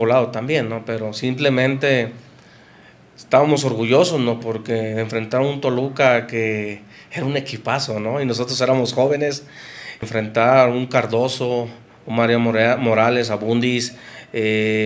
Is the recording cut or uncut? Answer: cut